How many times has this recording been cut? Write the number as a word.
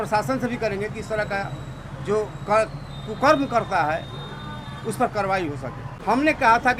one